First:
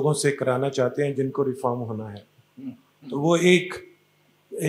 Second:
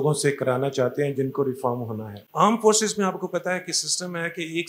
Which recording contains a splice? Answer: second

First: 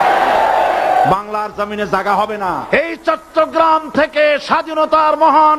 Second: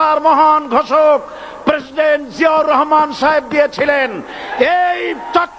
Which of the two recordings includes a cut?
first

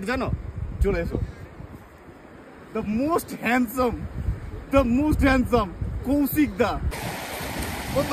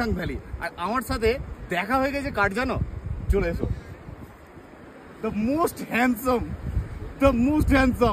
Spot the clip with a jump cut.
first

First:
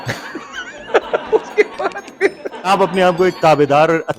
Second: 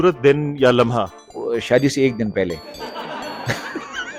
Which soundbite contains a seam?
first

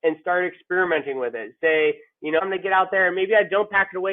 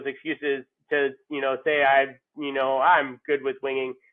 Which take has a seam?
first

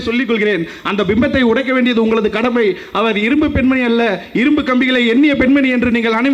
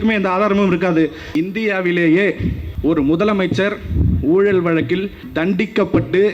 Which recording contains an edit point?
second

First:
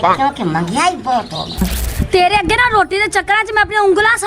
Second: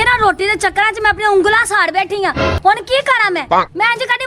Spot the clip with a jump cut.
first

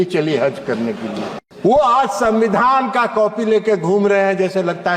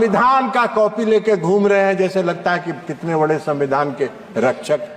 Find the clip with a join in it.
first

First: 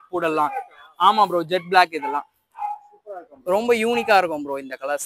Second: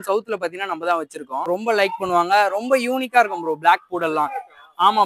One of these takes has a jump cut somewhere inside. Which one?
second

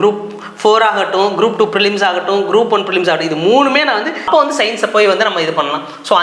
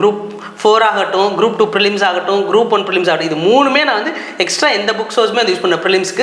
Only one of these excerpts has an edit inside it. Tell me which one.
first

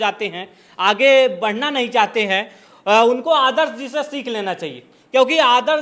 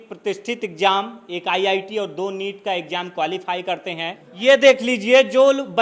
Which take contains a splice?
second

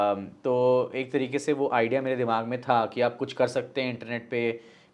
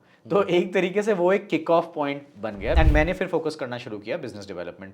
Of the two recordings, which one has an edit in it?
second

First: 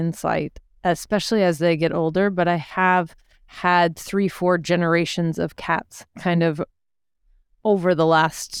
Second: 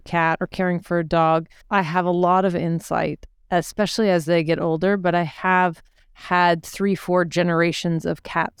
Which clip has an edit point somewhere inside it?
second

